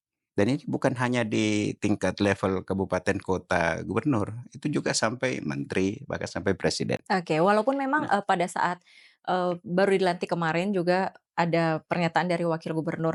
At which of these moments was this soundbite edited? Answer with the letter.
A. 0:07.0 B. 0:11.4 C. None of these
C